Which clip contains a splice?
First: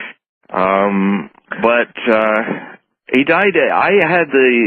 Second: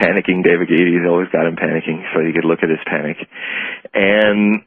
second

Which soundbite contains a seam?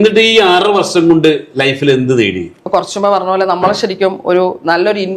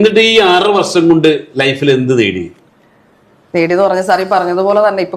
first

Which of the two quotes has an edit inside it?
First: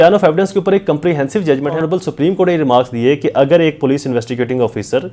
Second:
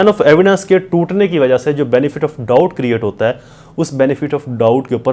first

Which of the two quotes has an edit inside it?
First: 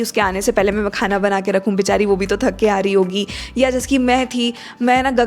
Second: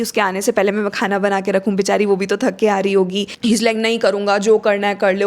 second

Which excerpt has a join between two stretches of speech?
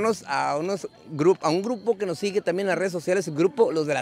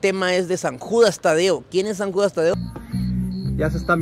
second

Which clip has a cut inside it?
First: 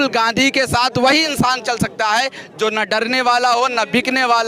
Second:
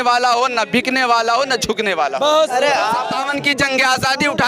second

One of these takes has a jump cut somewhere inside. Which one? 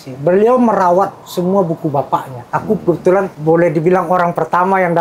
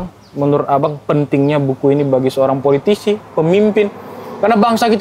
first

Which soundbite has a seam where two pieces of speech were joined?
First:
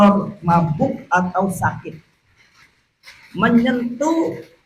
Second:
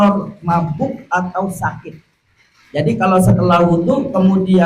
first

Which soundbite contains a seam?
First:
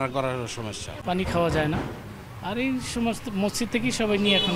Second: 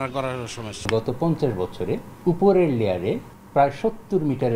second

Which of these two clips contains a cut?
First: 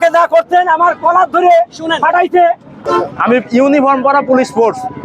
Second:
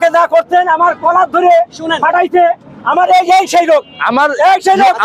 first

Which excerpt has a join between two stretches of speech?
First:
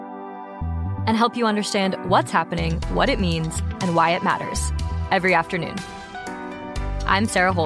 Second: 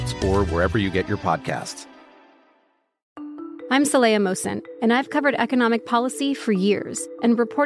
second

